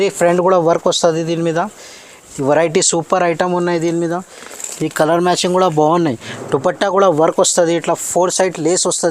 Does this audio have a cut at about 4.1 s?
no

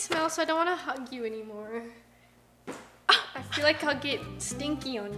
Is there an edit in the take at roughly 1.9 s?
no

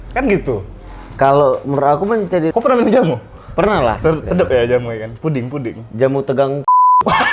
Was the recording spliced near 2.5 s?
yes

